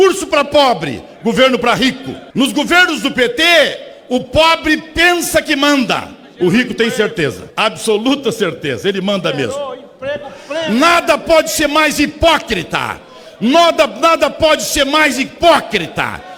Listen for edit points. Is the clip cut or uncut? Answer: uncut